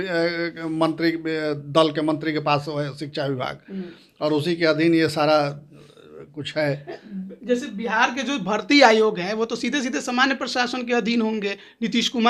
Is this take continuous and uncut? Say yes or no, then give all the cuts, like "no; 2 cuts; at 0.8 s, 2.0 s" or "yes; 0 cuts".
yes; 0 cuts